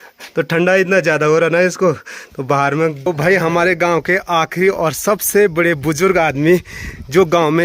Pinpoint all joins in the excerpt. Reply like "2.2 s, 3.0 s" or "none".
3.1 s